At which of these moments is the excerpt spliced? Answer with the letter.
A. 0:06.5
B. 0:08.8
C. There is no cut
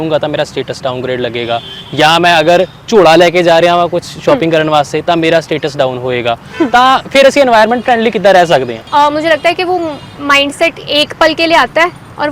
B